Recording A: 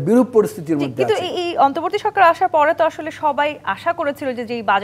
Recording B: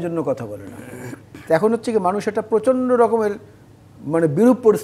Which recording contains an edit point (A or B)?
B